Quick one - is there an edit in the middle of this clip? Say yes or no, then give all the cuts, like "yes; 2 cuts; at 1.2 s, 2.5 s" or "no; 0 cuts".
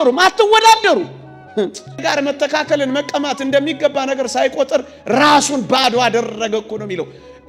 yes; 1 cut; at 2.0 s